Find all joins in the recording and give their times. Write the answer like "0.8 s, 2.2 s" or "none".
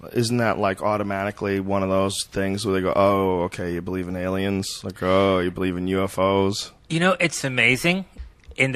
none